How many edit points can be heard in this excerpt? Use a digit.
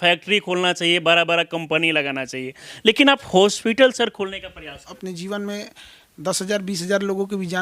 1